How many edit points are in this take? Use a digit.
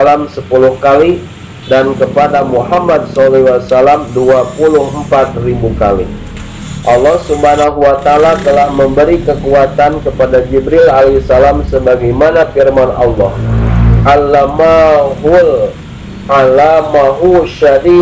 0